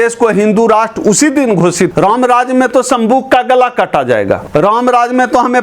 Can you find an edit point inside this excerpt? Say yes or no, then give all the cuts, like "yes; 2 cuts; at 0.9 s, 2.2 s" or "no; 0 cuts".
yes; 2 cuts; at 1.9 s, 4.4 s